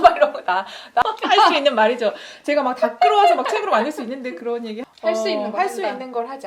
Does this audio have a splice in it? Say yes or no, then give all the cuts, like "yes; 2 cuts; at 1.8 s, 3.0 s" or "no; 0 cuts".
yes; 2 cuts; at 1.0 s, 4.9 s